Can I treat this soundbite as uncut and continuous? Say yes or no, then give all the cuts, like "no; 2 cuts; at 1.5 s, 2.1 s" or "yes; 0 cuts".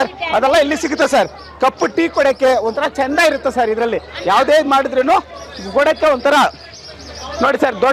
yes; 0 cuts